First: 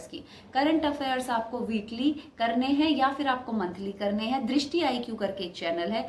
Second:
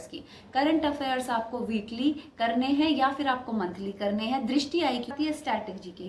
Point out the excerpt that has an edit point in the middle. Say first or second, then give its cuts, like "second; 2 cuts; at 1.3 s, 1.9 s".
second; 1 cut; at 5.1 s